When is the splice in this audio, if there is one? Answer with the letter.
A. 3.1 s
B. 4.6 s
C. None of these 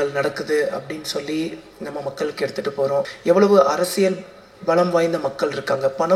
A